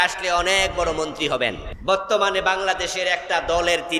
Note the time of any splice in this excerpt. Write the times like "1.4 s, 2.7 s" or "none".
1.7 s